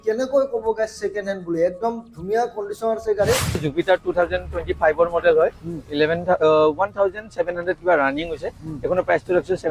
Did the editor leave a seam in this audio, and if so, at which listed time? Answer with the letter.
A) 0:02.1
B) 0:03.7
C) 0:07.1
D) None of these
B